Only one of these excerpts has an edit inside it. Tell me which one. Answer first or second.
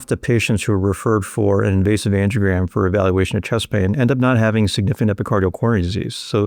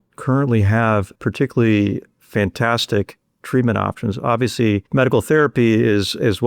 second